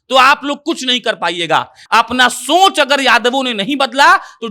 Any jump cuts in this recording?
yes; 1 cut; at 1.8 s

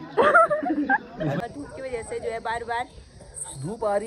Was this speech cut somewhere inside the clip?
yes; 1 cut; at 1.4 s

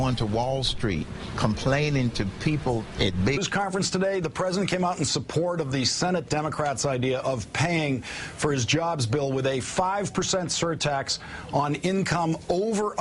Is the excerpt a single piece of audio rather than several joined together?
yes; 0 cuts

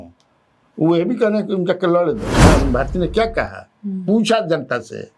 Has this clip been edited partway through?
yes; 1 cut; at 2.4 s

